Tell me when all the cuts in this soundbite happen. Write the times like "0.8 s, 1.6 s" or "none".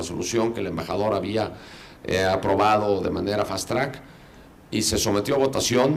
none